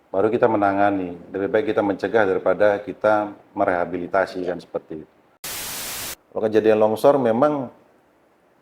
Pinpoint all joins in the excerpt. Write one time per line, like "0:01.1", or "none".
0:05.7